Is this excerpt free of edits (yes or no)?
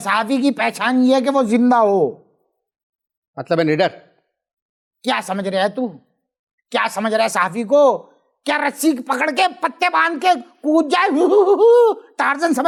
yes